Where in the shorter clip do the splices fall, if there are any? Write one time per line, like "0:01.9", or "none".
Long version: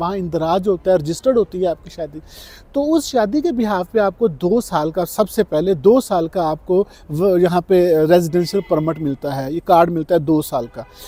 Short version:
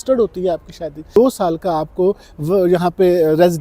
0:01.2